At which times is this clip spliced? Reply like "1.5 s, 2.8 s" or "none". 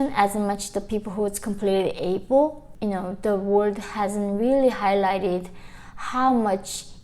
2.7 s